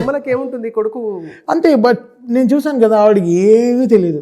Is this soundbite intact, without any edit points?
yes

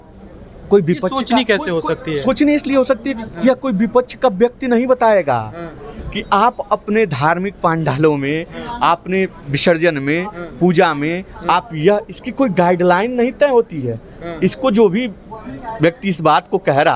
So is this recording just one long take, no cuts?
yes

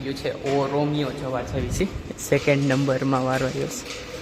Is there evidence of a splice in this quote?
no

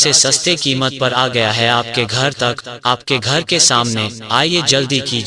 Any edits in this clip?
yes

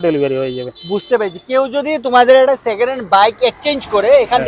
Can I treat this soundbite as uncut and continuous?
yes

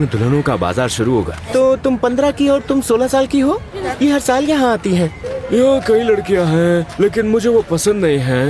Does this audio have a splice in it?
yes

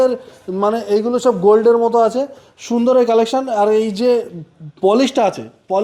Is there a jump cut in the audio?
no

